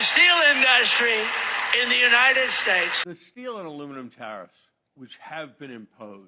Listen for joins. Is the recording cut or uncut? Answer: cut